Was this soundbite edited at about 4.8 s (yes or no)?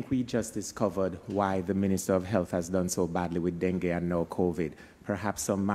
no